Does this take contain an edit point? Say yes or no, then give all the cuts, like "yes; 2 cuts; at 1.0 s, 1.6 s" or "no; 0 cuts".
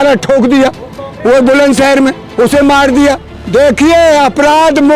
yes; 1 cut; at 3.3 s